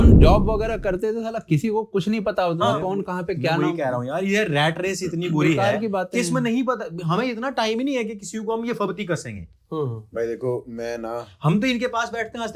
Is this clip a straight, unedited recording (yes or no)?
yes